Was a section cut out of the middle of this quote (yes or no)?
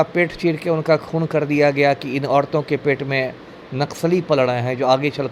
no